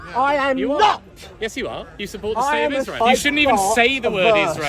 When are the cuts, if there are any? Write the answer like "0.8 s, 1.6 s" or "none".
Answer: 3.0 s